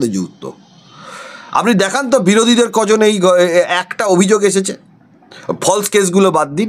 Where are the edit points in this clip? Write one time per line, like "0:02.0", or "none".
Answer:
none